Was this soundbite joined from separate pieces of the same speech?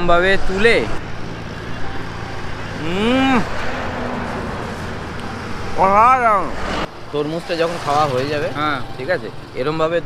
yes; 2 cuts; at 1.0 s, 6.7 s

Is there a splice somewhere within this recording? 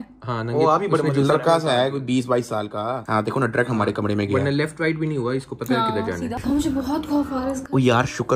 yes; 1 cut; at 6.3 s

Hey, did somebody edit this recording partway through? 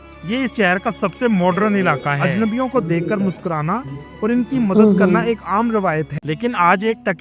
yes; 2 cuts; at 2.2 s, 6.1 s

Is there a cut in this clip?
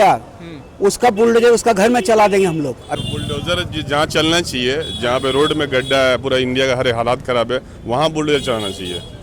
yes; 1 cut; at 2.8 s

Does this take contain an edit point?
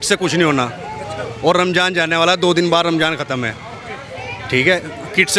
no; 0 cuts

